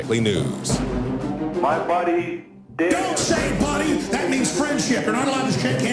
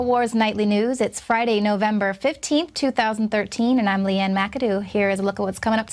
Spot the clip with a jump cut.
second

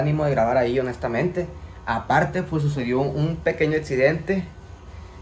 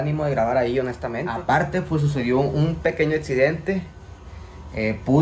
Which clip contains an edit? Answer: second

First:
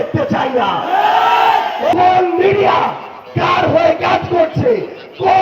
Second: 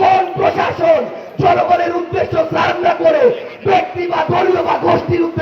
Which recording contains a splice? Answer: first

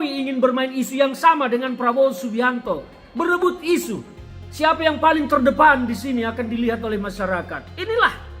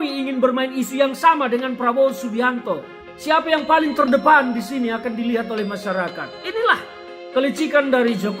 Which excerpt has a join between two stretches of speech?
second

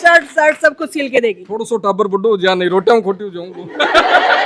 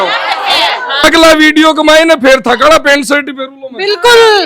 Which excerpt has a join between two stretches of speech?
second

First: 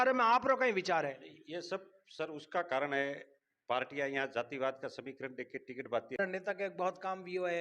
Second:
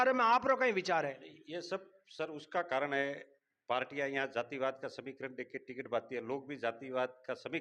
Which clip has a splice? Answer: first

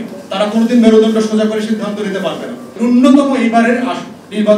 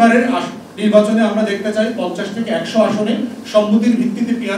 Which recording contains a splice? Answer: first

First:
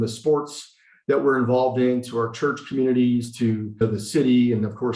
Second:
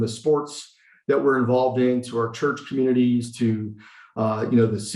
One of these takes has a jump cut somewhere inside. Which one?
first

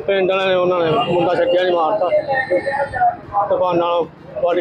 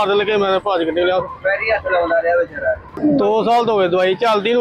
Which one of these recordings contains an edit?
second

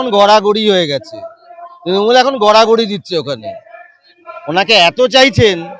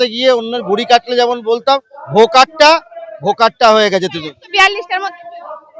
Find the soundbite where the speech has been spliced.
first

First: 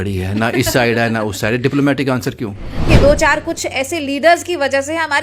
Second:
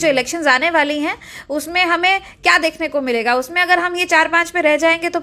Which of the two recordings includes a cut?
first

